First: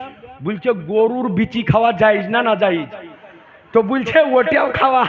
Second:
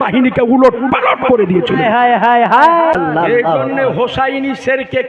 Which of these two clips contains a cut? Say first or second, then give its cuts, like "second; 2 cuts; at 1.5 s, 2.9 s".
second; 1 cut; at 2.9 s